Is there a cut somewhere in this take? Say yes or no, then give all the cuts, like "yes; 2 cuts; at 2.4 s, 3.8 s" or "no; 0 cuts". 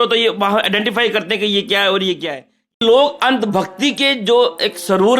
yes; 1 cut; at 2.8 s